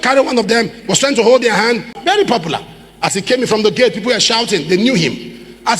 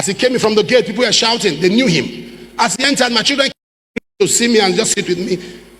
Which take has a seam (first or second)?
first